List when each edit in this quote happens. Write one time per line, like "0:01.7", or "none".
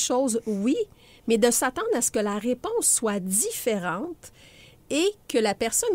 none